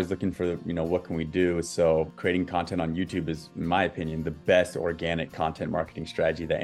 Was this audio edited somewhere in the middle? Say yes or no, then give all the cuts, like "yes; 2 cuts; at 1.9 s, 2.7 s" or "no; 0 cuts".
yes; 1 cut; at 2.1 s